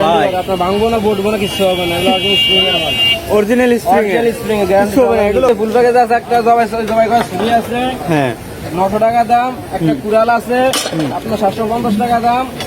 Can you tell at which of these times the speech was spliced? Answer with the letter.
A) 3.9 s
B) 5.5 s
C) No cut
B